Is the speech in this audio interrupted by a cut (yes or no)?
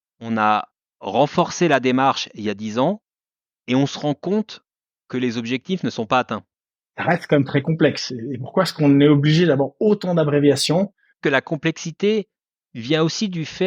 yes